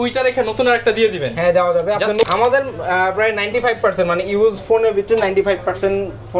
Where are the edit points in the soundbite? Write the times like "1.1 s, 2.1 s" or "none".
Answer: 2.3 s